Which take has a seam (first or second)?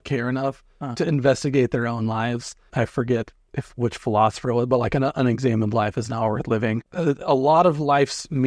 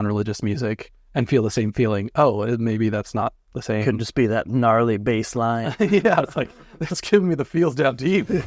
first